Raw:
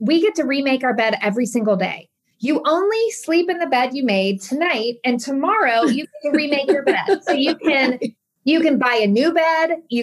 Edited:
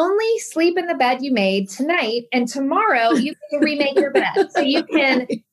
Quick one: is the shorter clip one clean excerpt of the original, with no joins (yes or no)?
yes